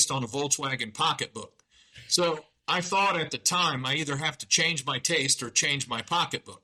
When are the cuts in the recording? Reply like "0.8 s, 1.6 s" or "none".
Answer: none